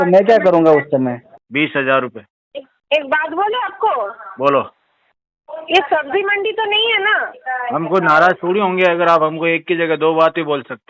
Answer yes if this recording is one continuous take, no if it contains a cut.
no